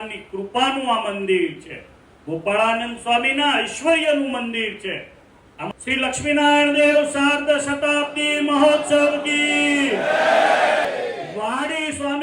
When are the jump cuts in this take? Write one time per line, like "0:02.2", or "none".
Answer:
0:05.7
0:10.8